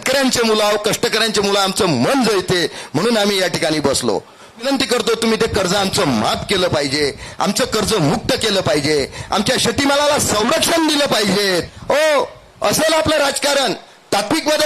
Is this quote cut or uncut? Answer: cut